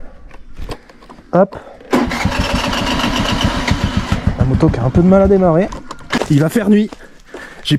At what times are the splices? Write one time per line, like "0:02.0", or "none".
0:06.0